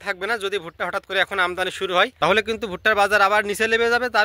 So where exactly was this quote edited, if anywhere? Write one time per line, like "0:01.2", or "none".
0:02.1